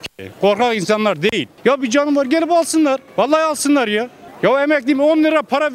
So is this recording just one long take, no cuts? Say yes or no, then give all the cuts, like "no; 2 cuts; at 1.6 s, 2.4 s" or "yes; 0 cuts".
no; 1 cut; at 1.4 s